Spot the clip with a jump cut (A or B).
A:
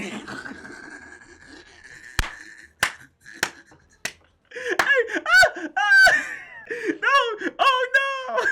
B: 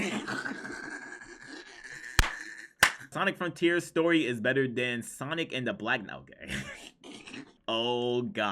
B